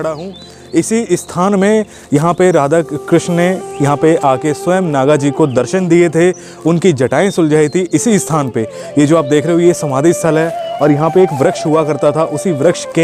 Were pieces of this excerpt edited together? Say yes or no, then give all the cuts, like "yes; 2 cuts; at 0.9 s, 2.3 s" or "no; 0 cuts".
no; 0 cuts